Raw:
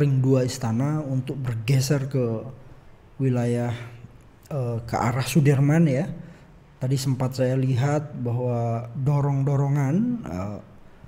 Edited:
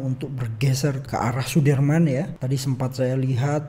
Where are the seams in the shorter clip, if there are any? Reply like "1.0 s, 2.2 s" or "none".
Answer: 1.0 s, 2.4 s